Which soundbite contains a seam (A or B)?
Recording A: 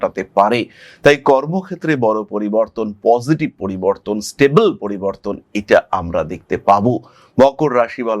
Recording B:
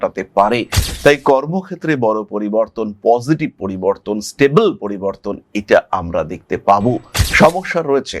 B